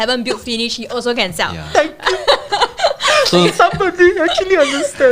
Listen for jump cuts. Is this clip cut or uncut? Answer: uncut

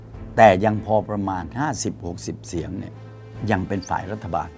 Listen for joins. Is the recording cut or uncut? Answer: uncut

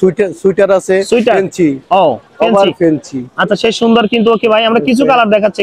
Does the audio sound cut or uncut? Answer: uncut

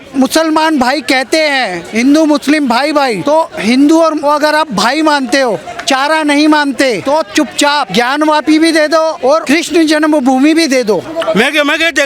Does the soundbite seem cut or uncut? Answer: cut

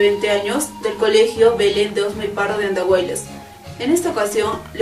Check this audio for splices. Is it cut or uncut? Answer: cut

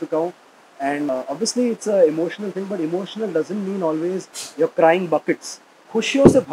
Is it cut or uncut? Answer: cut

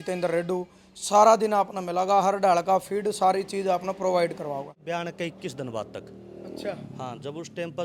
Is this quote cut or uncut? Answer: cut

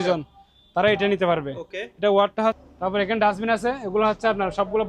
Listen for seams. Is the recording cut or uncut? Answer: cut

